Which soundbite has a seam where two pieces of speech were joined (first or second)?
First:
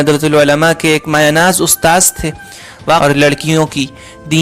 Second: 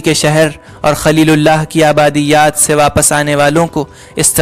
first